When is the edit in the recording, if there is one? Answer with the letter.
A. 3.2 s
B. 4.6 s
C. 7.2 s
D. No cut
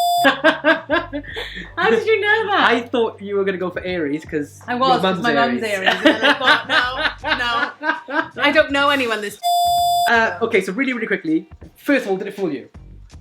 D